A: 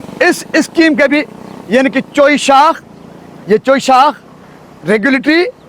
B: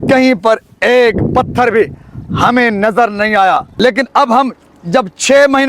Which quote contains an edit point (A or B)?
B